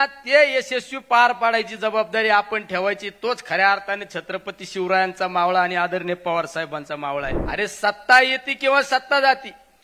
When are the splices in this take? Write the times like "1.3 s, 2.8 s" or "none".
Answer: 7.4 s

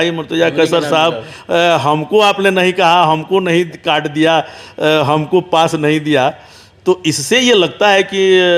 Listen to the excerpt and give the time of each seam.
none

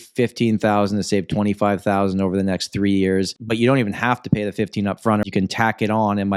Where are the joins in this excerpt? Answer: 3.4 s, 5.2 s

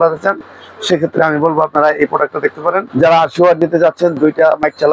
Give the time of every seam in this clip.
2.9 s

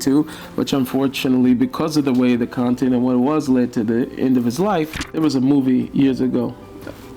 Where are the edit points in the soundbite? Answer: 5.1 s

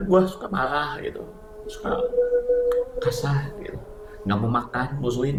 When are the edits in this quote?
none

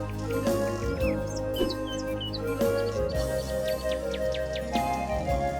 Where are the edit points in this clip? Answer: none

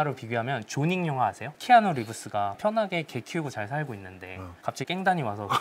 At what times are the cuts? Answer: 1.5 s

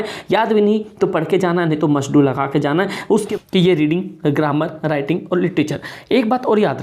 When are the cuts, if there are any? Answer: 3.2 s

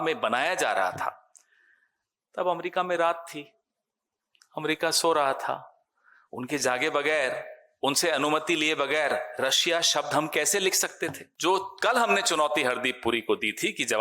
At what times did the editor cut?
11.3 s

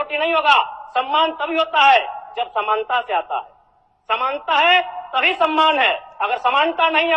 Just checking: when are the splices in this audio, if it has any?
none

